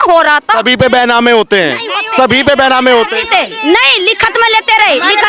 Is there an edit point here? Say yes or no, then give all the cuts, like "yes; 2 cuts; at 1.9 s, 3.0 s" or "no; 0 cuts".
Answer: no; 0 cuts